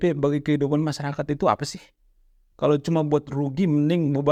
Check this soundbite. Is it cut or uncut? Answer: uncut